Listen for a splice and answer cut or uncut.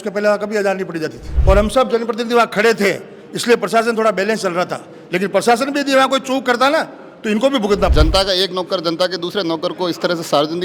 cut